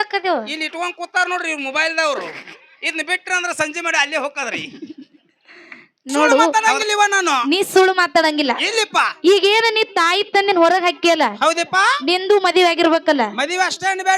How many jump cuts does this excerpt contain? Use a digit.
1